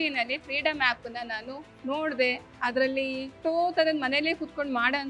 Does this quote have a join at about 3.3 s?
yes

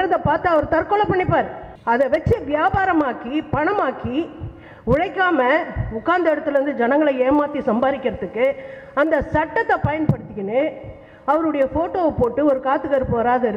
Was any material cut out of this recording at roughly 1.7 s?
yes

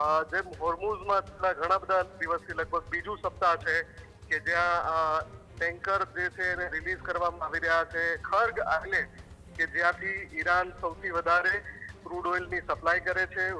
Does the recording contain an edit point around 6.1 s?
no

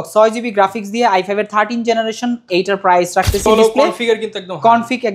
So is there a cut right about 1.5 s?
no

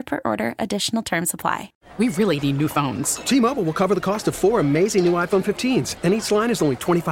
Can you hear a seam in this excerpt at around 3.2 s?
no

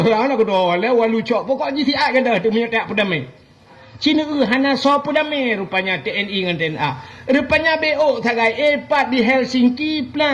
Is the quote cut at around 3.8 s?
yes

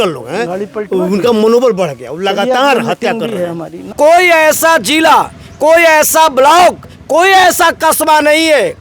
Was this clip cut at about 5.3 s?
no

